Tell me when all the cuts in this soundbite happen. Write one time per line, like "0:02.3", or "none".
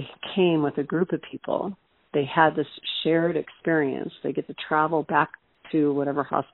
0:05.5